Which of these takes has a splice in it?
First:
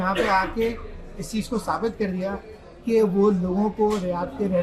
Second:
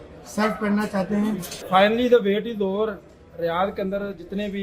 second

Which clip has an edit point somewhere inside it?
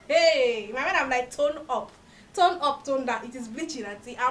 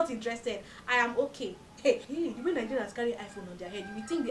second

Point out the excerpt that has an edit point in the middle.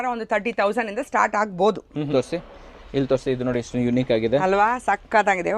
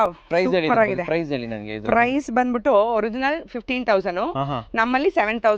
first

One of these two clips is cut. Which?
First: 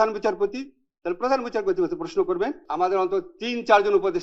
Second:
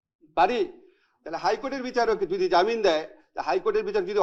first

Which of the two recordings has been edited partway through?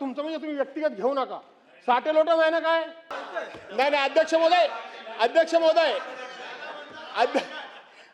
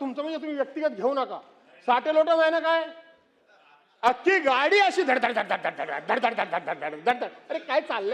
first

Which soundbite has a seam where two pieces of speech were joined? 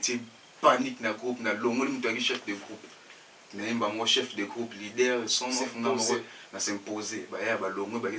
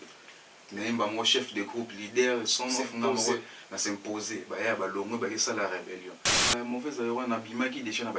second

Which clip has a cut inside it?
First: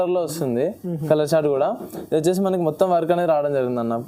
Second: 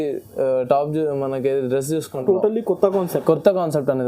second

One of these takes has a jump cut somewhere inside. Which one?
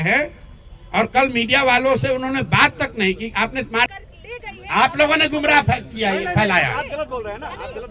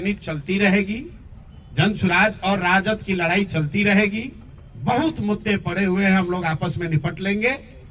first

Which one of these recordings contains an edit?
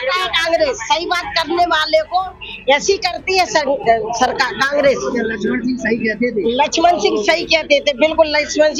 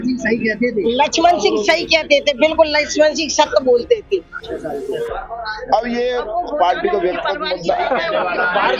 second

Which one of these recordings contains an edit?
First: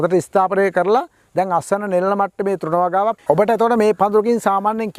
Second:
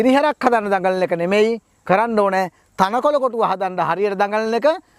first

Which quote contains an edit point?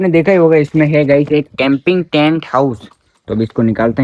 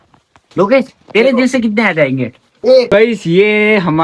second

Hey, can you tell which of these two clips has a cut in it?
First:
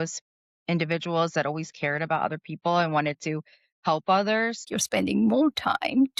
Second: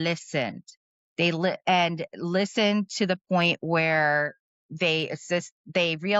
first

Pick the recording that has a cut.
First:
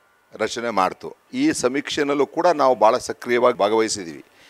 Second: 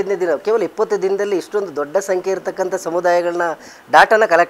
first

